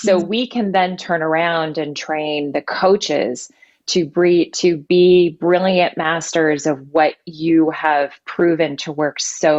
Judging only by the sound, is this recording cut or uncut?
uncut